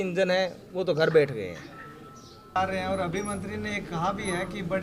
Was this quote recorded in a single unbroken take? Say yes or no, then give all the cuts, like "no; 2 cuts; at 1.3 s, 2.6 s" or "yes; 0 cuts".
no; 1 cut; at 2.6 s